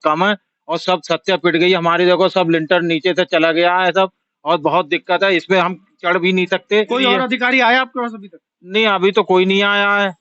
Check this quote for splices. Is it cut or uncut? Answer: cut